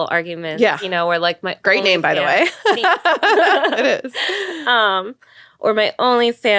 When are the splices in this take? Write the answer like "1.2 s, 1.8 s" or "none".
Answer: none

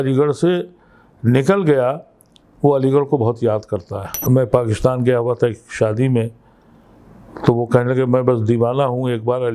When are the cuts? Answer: 4.1 s

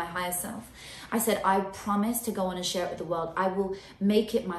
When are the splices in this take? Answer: none

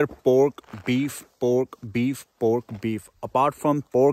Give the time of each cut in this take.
none

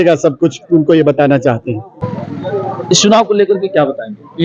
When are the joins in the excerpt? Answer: 2.1 s

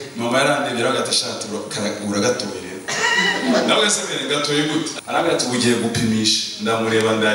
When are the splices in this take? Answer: 4.9 s

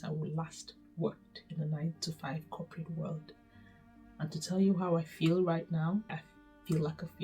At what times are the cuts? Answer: 6.1 s

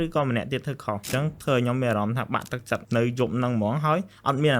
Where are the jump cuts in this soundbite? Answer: 1.0 s, 2.8 s

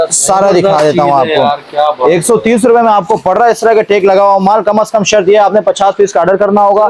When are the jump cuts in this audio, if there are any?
none

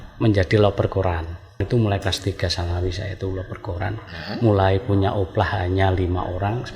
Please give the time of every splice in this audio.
1.6 s

